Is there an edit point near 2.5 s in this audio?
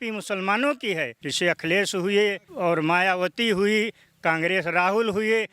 yes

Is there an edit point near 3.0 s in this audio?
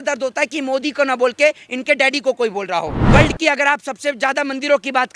yes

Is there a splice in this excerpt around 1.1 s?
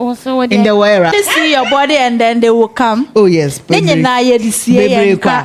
yes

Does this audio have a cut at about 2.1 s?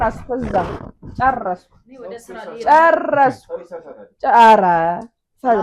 no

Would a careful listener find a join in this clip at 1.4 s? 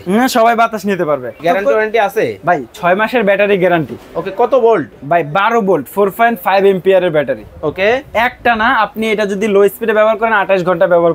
yes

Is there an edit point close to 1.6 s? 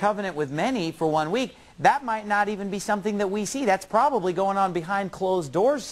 no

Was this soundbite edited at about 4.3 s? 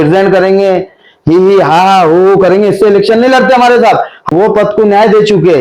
yes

